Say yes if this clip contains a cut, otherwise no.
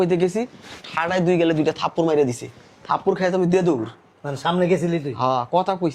no